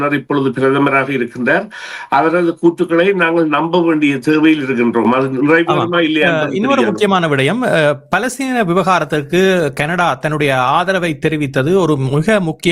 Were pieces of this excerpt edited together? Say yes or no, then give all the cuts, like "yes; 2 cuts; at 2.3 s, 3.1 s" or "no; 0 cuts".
no; 0 cuts